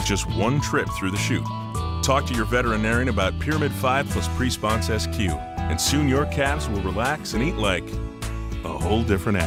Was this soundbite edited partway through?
no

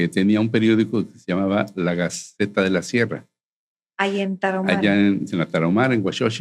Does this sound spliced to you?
no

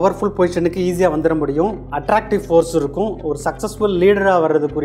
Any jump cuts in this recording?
no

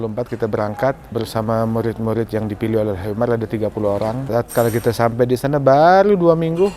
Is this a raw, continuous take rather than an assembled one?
no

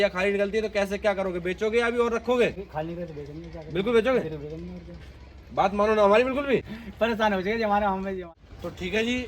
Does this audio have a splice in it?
yes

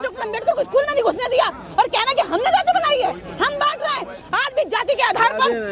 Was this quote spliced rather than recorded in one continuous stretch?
yes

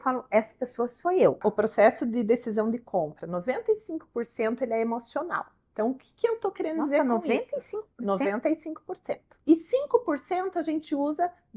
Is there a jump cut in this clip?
yes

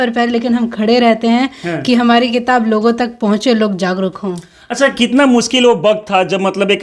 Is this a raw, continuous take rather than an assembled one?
yes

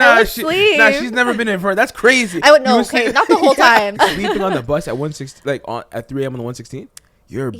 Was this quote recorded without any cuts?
no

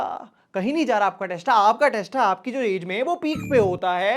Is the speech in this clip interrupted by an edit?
no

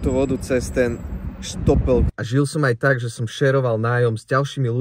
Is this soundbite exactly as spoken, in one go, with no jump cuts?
no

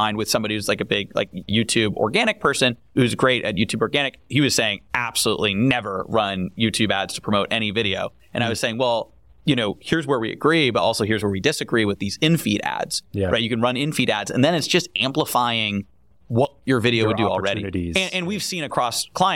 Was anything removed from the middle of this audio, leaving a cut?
yes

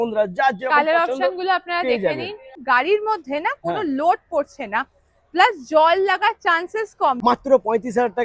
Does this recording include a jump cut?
yes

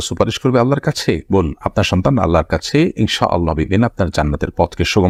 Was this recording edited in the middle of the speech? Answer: no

